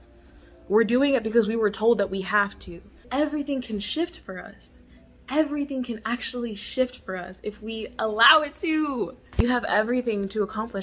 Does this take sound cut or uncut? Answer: cut